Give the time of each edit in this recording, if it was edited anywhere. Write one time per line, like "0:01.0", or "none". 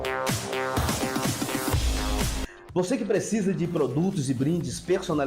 0:00.9